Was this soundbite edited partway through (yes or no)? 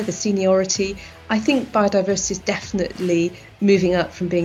yes